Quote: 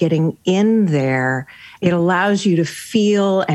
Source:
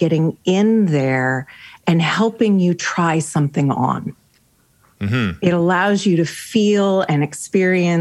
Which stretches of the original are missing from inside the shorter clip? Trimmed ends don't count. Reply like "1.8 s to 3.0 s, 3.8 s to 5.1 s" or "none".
1.7 s to 5.3 s